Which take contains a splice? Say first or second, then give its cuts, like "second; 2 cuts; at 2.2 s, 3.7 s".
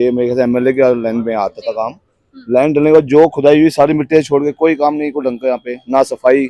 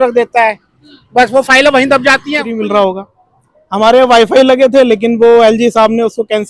second; 1 cut; at 2.5 s